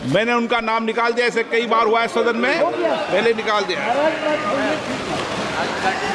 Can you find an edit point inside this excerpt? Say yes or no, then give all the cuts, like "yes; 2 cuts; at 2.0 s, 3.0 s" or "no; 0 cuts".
no; 0 cuts